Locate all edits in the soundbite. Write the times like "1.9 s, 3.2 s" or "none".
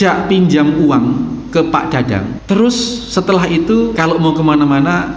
2.4 s, 3.9 s